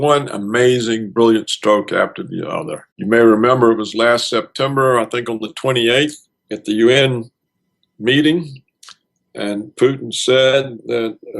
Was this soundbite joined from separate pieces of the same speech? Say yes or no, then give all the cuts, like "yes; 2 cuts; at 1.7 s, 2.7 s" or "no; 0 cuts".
yes; 1 cut; at 1.1 s